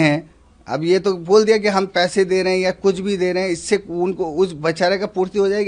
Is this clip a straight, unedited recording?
yes; 0 cuts

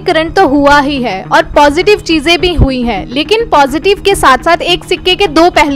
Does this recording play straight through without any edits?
yes; 0 cuts

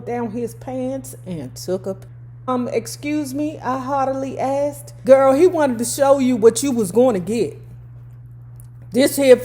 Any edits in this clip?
yes; 1 cut; at 2.0 s

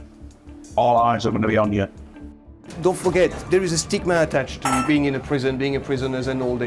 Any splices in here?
yes; 2 cuts; at 2.4 s, 3.4 s

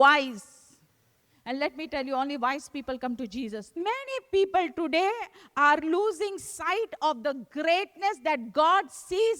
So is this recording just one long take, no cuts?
no; 1 cut; at 3.7 s

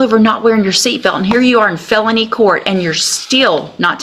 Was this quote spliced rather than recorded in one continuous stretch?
no; 0 cuts

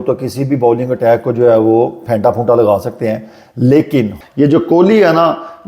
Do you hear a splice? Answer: yes; 1 cut; at 4.2 s

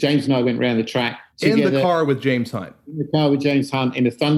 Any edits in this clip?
no; 0 cuts

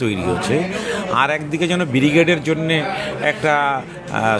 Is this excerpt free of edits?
yes; 0 cuts

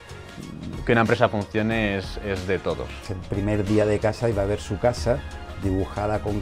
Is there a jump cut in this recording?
yes; 1 cut; at 3.0 s

